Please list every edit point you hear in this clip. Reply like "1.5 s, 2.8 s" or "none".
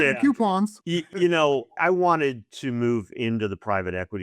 1.0 s, 1.8 s